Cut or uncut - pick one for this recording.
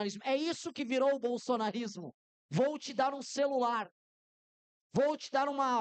uncut